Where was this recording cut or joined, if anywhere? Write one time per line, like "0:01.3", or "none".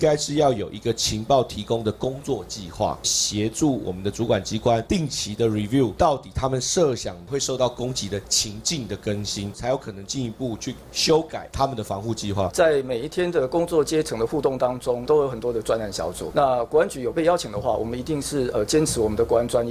0:03.1
0:07.2
0:09.6
0:11.4
0:12.5
0:15.0